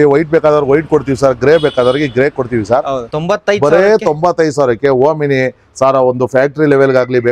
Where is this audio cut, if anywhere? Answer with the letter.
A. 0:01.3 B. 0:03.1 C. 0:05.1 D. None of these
B